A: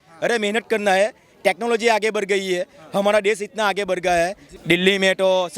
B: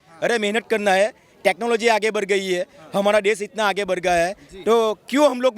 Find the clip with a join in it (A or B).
A